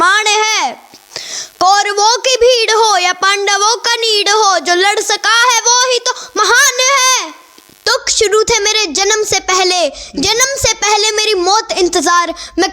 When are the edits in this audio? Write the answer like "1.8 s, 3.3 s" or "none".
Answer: 7.9 s